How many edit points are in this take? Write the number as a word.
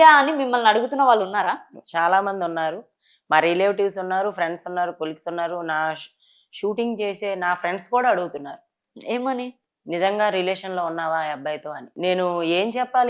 one